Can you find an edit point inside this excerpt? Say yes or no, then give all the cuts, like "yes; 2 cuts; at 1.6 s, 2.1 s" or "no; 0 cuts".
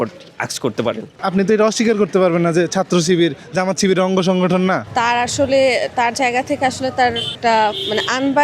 yes; 3 cuts; at 1.2 s, 4.9 s, 7.3 s